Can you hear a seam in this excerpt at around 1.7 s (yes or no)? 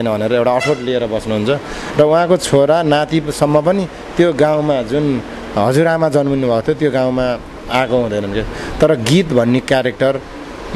no